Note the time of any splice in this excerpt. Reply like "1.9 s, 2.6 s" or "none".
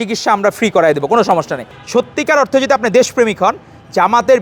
1.7 s